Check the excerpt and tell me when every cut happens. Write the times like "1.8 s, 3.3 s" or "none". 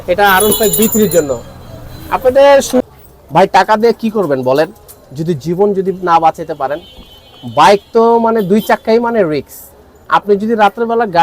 2.8 s